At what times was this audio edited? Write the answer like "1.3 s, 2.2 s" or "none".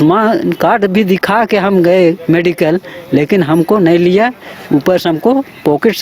none